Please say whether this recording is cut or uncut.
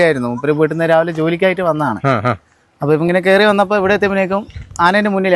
uncut